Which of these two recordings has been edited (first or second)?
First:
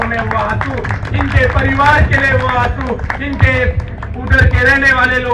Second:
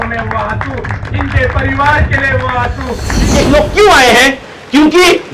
second